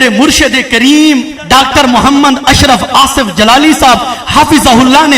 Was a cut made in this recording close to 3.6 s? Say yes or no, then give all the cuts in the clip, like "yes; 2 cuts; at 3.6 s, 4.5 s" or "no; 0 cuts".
no; 1 cut; at 1.4 s